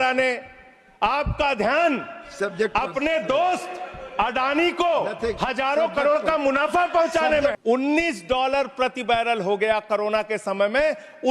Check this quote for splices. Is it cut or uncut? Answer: cut